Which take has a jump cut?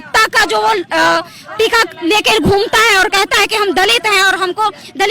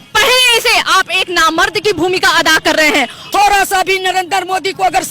second; 1 cut; at 3.2 s

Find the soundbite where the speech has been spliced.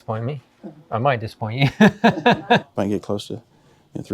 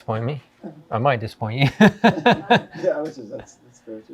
first; 1 cut; at 2.7 s

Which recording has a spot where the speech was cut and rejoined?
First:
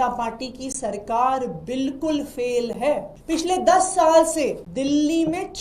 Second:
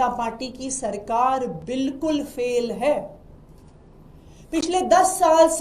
first; 2 cuts; at 3.1 s, 4.6 s

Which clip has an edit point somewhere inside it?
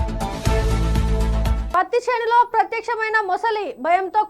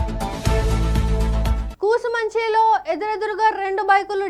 first; 1 cut; at 1.6 s

